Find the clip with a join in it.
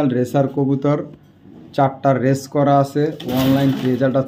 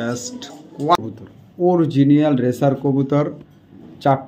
second; 1 cut; at 1.0 s

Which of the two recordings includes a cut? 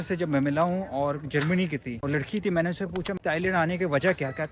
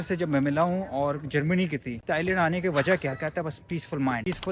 second; 1 cut; at 2.0 s

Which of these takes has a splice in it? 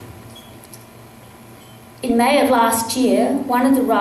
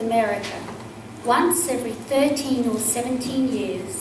first; 1 cut; at 1.5 s

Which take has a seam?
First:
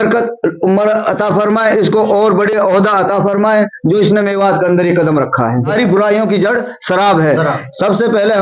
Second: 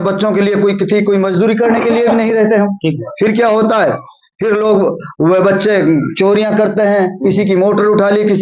first; 1 cut; at 5.7 s

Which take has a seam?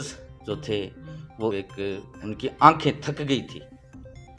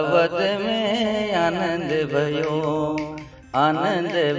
first; 1 cut; at 1.5 s

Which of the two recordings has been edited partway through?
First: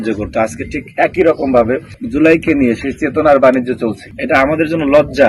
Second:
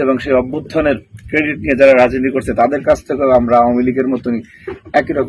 first; 2 cuts; at 1.9 s, 4.1 s

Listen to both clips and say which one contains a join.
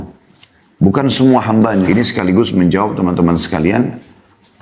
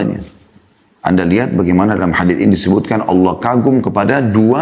first; 1 cut; at 1.9 s

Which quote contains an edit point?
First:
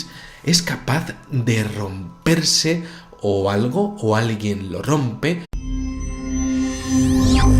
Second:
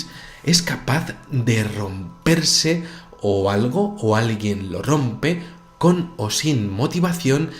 second; 1 cut; at 5.6 s

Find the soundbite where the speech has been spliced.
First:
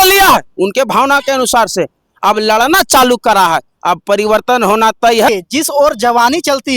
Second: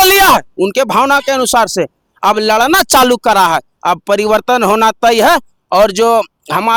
first; 1 cut; at 5.3 s

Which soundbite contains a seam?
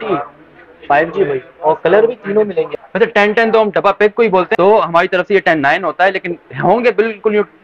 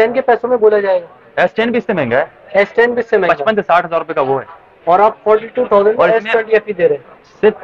first; 2 cuts; at 2.7 s, 4.5 s

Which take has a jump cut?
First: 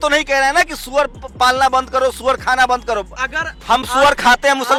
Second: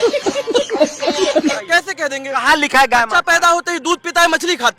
second; 1 cut; at 1.6 s

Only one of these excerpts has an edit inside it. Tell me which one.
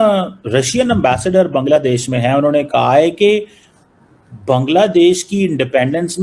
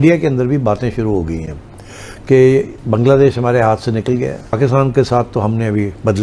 second; 1 cut; at 4.6 s

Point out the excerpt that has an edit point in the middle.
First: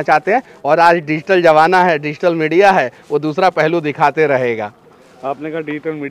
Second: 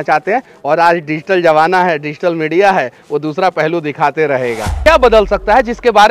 second; 1 cut; at 4.8 s

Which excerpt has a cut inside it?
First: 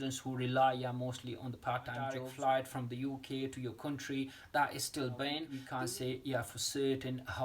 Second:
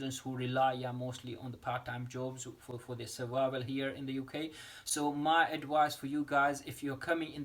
first; 2 cuts; at 2.2 s, 5.6 s

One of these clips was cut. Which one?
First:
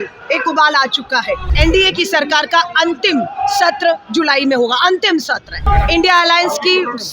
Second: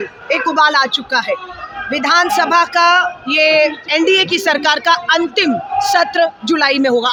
first; 2 cuts; at 1.5 s, 5.6 s

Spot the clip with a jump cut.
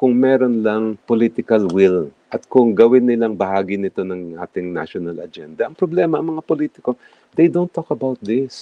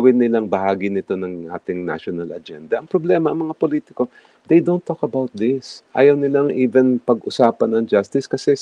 first; 1 cut; at 1.0 s

